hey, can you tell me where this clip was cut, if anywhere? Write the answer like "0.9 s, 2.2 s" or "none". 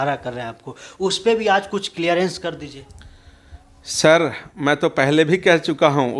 none